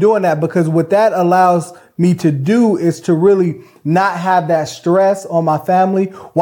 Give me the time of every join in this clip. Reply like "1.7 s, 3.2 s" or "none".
none